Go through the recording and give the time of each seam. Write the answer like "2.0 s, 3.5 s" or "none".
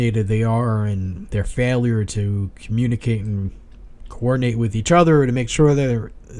none